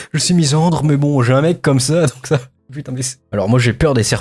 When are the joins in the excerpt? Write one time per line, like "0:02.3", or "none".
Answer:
0:03.2